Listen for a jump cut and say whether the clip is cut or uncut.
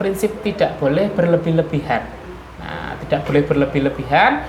uncut